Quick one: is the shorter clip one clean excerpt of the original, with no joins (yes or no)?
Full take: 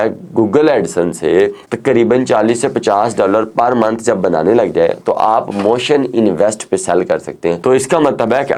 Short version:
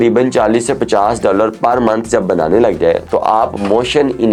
yes